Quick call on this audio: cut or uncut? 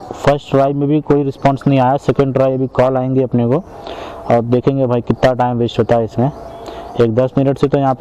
uncut